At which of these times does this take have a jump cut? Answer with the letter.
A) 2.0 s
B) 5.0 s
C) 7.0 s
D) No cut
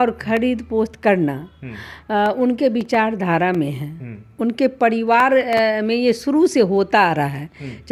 D